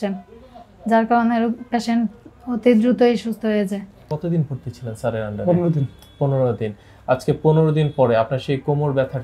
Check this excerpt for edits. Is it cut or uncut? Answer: cut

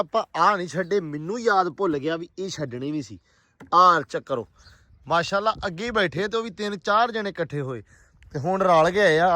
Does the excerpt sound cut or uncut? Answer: uncut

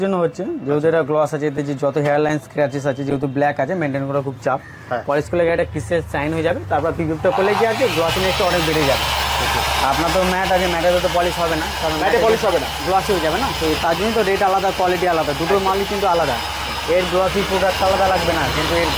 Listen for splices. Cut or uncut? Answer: uncut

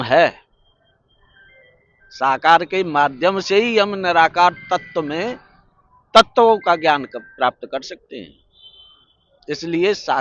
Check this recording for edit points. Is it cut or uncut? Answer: uncut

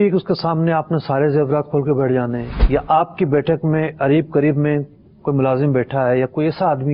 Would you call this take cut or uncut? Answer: cut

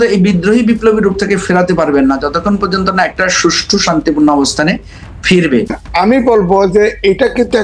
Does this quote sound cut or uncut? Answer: cut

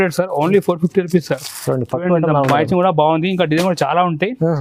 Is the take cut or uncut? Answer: uncut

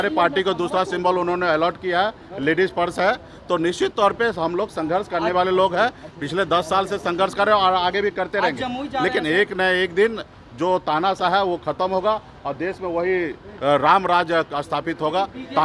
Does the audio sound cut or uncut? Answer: uncut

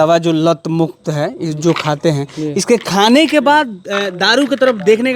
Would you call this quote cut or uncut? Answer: uncut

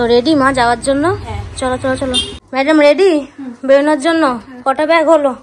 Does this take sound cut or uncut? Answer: cut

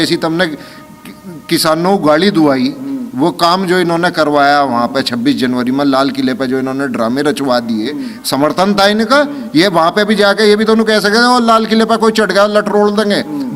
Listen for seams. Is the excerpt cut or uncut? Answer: uncut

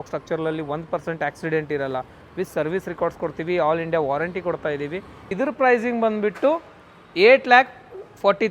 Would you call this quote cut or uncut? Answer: cut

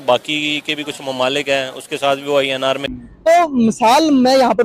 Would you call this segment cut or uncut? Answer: cut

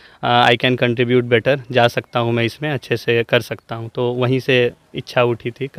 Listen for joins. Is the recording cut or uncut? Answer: uncut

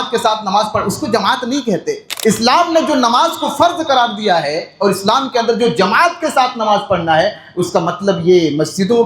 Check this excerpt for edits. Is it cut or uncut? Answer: cut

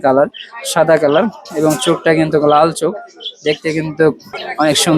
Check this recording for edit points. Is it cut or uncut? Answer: uncut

